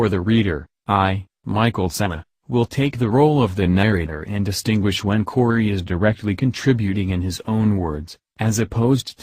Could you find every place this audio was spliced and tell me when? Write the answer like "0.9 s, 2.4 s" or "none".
3.1 s